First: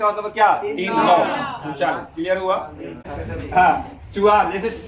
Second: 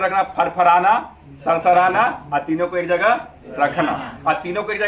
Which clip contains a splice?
first; 1 cut; at 3.1 s

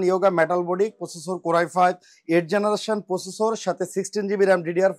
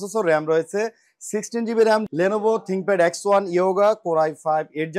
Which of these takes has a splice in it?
second; 1 cut; at 2.1 s

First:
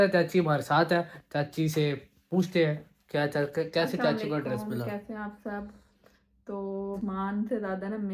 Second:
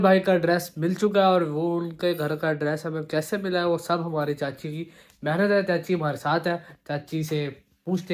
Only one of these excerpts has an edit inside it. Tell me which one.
first; 1 cut; at 7.0 s

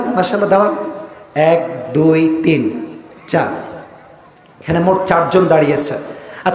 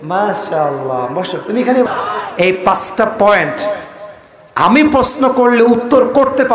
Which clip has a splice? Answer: second; 1 cut; at 1.9 s

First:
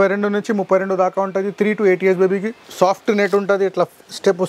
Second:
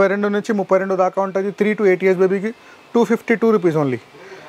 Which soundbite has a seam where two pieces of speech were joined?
first; 1 cut; at 2.6 s

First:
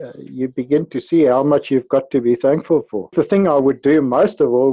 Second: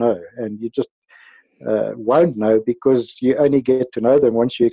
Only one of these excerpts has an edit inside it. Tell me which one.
first; 1 cut; at 3.1 s

